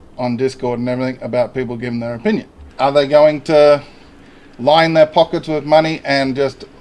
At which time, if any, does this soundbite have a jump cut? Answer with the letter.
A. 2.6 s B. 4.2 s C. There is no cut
A